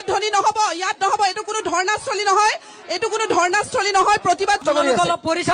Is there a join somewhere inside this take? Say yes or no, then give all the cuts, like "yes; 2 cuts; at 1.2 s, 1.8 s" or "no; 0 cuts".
yes; 1 cut; at 4.6 s